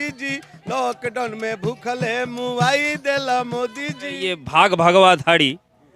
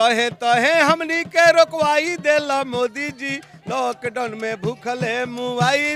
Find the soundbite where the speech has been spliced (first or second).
first